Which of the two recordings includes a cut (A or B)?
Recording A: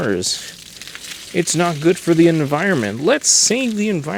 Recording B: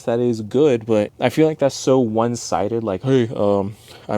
B